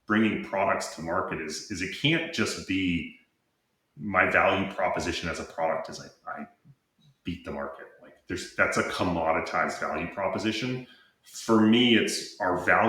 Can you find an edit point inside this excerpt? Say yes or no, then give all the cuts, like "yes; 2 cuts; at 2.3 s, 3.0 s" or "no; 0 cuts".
no; 0 cuts